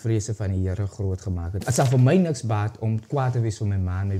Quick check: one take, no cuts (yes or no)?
no